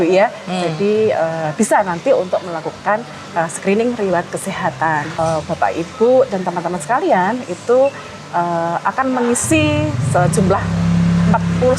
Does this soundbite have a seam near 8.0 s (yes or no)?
no